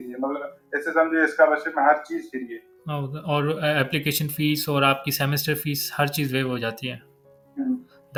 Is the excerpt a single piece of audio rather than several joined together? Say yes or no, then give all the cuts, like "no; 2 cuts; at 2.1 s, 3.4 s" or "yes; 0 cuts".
yes; 0 cuts